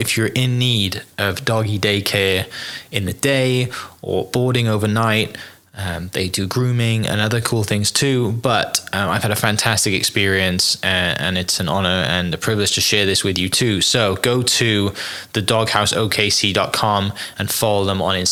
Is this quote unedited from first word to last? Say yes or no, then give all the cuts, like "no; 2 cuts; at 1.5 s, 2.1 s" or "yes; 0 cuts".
yes; 0 cuts